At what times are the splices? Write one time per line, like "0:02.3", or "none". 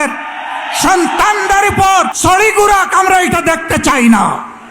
0:02.1

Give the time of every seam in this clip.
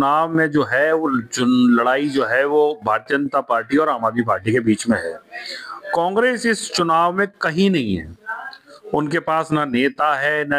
none

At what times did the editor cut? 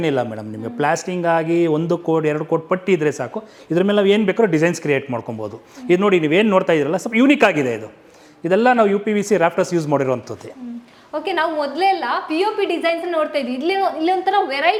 none

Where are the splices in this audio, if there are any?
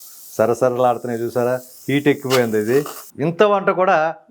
0:03.0

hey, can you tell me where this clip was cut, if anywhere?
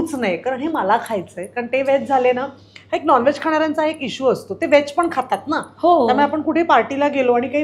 none

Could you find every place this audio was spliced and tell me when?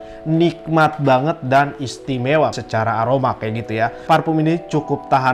0:02.6
0:04.0

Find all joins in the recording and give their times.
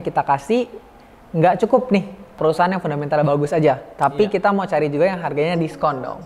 0:02.4

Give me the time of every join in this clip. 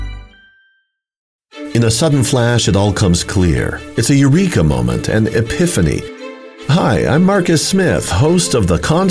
0:01.4

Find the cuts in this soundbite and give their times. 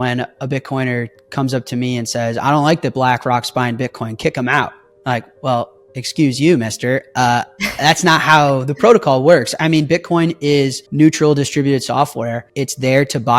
0:10.8
0:12.5

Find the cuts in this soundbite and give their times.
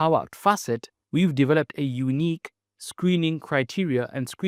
0:00.9

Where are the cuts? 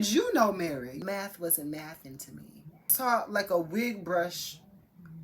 0:00.9
0:02.9

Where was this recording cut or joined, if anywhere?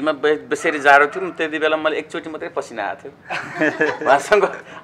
none

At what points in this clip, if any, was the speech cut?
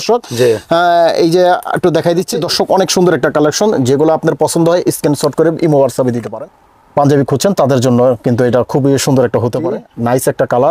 0:02.4
0:06.3
0:09.8

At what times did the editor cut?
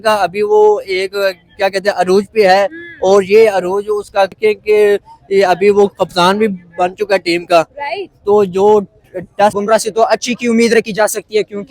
0:04.4
0:09.6

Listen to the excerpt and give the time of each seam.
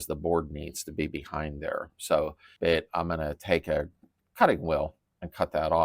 0:02.4

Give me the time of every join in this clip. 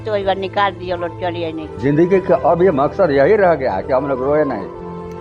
0:01.8

